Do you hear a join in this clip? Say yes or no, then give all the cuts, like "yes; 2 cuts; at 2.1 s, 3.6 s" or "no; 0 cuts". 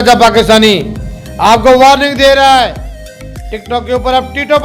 no; 0 cuts